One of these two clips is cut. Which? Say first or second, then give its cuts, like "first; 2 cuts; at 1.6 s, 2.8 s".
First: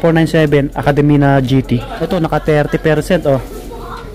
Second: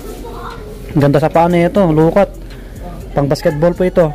first; 1 cut; at 2.0 s